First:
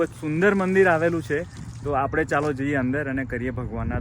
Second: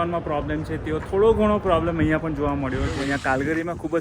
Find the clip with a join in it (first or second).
second